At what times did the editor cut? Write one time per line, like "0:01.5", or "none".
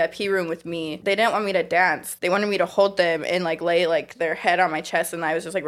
0:01.0
0:02.1